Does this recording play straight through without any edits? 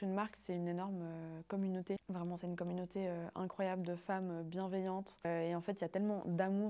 no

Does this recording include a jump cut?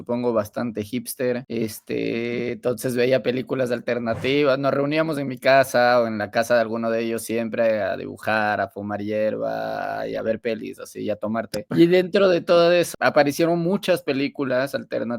yes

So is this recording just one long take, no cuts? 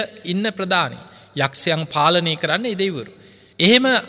yes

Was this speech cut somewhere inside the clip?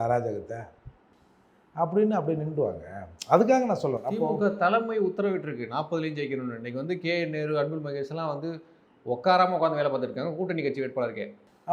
no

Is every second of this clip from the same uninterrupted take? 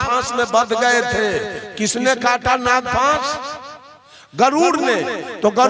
yes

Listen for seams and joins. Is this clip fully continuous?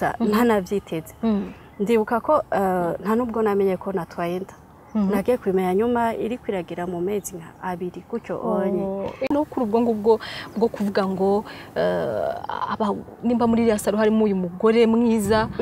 no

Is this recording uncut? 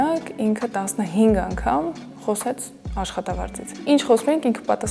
yes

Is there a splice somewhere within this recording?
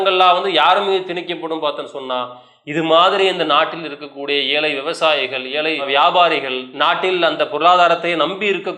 no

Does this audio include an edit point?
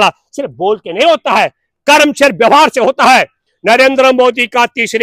no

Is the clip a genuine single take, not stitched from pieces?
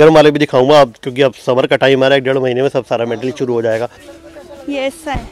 no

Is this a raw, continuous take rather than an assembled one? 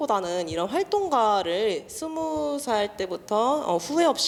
yes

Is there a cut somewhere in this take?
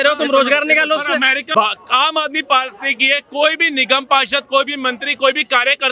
yes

